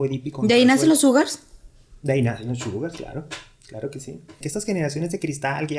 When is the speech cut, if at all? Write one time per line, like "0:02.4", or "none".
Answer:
0:04.4